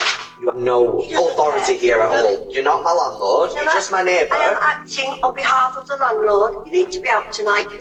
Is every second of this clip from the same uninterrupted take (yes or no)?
yes